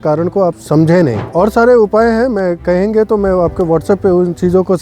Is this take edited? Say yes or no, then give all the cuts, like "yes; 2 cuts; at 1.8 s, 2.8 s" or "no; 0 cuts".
yes; 1 cut; at 1.3 s